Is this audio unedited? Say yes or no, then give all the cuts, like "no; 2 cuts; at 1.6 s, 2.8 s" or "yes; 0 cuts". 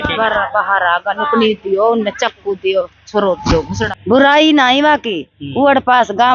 no; 1 cut; at 3.8 s